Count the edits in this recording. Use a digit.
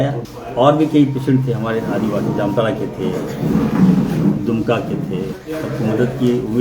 1